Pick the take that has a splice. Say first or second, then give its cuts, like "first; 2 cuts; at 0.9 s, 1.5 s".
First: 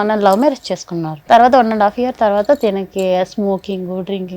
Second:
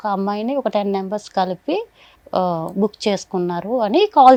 first; 1 cut; at 1.1 s